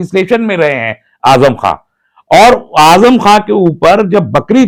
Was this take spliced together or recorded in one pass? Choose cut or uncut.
uncut